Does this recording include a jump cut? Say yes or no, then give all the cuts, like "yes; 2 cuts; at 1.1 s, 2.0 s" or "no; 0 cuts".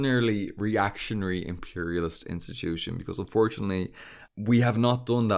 yes; 1 cut; at 4.2 s